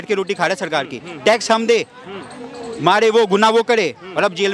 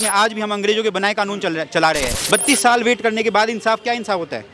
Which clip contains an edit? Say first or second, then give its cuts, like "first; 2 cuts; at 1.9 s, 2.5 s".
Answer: second; 1 cut; at 2.2 s